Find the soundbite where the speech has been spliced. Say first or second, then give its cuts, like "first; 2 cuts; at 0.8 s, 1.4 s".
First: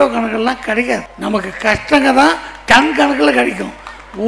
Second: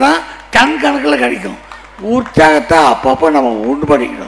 first; 1 cut; at 1.1 s